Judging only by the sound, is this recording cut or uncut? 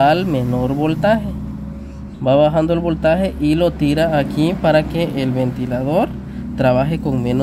uncut